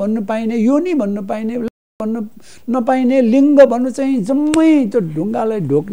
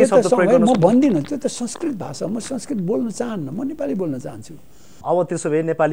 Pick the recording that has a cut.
second; 1 cut; at 4.9 s

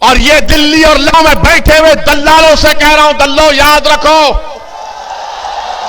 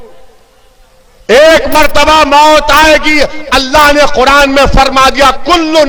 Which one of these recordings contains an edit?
first; 1 cut; at 1.1 s

